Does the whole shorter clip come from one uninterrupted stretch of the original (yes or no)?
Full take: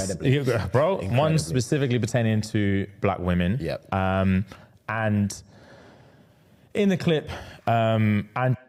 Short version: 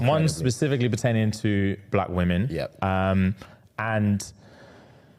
yes